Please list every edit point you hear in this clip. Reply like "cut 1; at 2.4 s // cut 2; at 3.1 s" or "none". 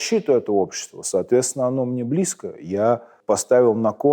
cut 1; at 3.1 s